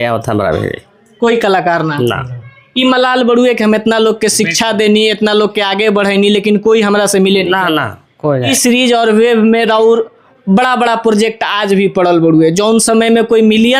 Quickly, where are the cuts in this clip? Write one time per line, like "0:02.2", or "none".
0:08.5